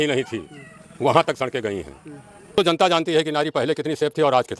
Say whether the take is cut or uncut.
cut